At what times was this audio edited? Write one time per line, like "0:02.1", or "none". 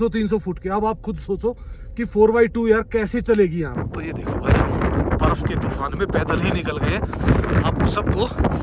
0:03.7